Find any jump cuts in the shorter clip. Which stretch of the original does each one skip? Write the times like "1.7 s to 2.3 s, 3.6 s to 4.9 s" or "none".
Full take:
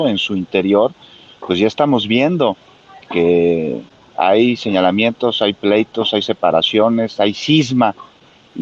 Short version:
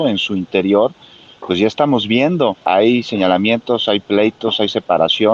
2.6 s to 4.1 s

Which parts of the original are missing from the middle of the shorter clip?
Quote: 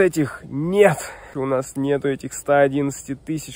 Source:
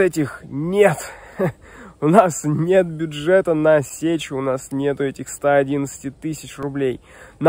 1.3 s to 4.3 s

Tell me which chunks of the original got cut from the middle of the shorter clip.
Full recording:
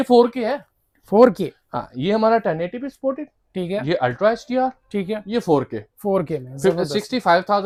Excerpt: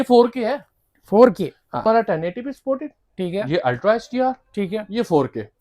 1.8 s to 2.2 s

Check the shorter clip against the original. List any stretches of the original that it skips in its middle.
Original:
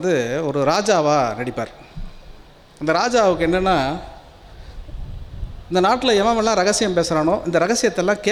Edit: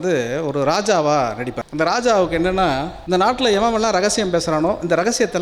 1.6 s to 2.7 s, 4.0 s to 5.6 s

